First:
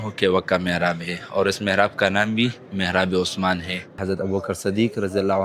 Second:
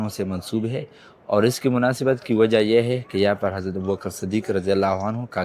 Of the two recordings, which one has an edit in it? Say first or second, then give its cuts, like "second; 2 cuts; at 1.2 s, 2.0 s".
first; 1 cut; at 4.0 s